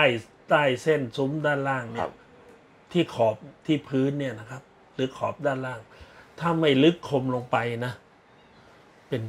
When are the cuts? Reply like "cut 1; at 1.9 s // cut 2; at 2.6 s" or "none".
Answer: none

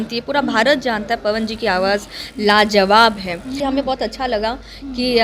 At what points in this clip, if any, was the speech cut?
cut 1; at 3.6 s

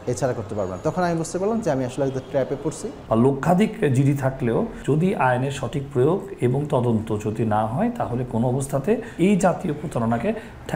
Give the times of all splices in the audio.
cut 1; at 2.9 s // cut 2; at 9.1 s

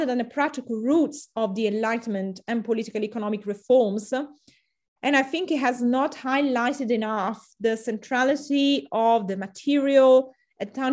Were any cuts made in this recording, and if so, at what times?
none

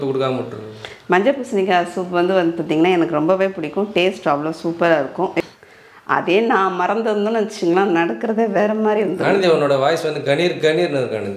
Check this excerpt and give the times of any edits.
cut 1; at 5.4 s

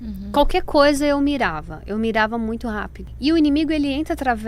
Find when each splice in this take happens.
cut 1; at 3.0 s

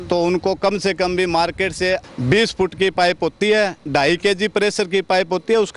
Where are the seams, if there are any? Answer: cut 1; at 2.1 s

